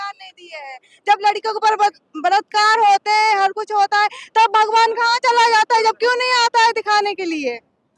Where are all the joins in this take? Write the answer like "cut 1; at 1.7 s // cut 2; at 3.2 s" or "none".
none